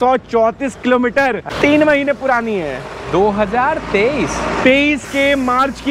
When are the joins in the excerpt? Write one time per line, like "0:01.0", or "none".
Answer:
0:01.5

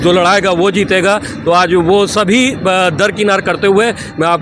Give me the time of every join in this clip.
none

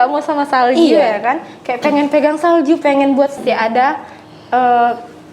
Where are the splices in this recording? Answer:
0:03.4

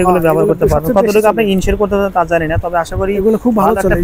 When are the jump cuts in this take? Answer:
none

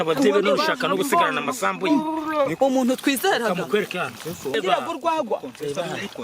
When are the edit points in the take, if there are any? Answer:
0:04.5

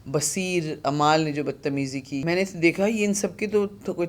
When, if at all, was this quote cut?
0:02.2

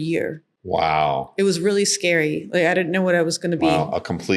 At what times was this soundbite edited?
none

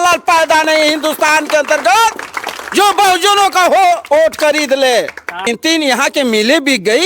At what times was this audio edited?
0:05.5

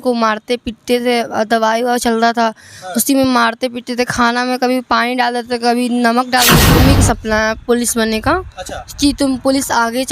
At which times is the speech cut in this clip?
0:06.7

